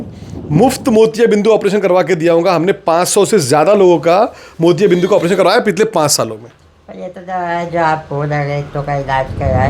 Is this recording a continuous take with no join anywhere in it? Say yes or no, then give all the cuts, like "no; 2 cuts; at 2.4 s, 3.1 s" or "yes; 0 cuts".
yes; 0 cuts